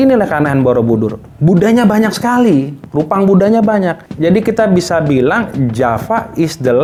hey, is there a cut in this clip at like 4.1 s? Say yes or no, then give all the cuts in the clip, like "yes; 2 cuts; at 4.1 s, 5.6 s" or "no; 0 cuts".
no; 0 cuts